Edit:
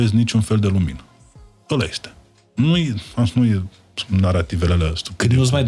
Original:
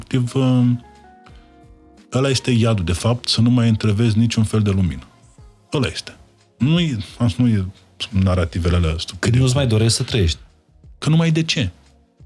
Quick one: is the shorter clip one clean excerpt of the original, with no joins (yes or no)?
yes